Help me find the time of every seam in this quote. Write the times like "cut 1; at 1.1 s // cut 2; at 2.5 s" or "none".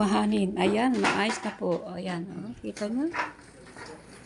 none